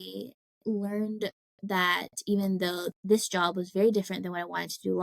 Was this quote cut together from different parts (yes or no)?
yes